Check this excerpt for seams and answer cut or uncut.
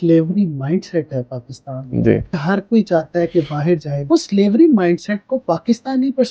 cut